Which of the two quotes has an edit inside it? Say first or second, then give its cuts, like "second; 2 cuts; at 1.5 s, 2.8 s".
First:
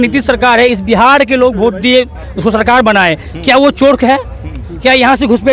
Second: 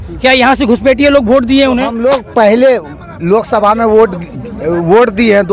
second; 1 cut; at 1.9 s